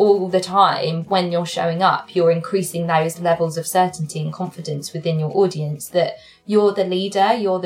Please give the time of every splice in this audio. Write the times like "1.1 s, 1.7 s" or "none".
none